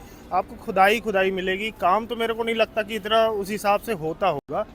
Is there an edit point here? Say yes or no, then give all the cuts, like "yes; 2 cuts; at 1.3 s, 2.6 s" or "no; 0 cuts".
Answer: no; 0 cuts